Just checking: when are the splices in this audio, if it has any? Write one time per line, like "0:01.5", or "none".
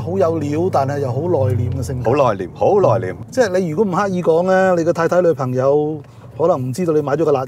0:03.2